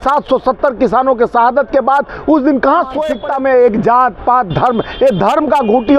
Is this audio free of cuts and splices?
no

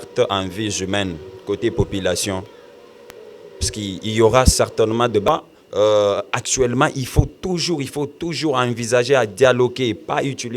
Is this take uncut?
no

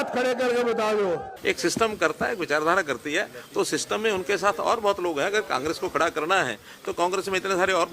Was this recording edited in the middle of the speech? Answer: yes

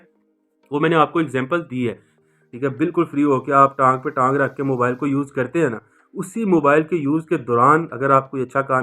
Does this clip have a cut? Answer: yes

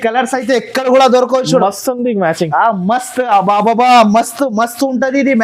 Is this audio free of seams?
yes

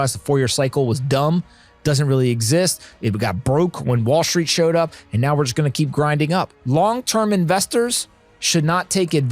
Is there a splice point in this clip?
yes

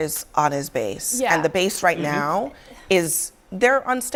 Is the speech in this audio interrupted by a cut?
no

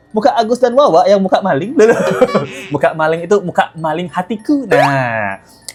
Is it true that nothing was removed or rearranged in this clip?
yes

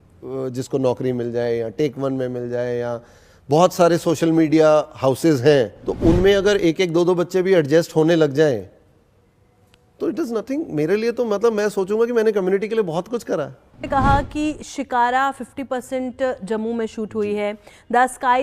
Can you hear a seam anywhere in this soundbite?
yes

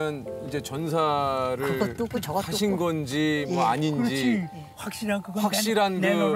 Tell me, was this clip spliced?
no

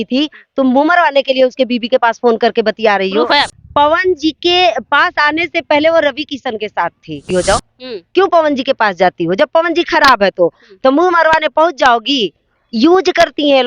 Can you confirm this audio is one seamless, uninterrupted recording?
no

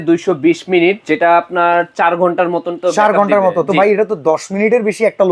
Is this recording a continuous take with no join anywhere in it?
yes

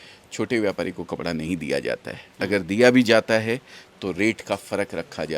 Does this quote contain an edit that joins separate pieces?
no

